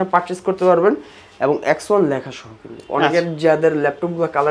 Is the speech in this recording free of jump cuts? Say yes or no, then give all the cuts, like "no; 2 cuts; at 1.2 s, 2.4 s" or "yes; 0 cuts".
yes; 0 cuts